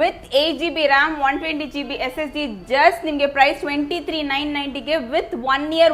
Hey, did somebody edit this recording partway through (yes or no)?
no